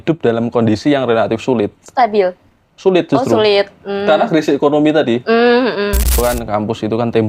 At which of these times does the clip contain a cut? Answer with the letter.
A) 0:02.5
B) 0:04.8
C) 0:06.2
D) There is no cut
C